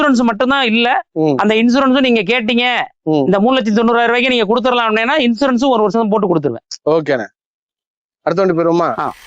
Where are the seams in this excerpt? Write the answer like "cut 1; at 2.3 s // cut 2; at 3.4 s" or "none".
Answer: none